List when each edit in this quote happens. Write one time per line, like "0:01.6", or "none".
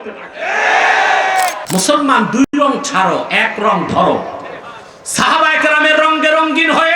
0:01.6